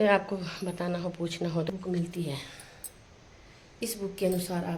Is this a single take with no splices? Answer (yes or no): no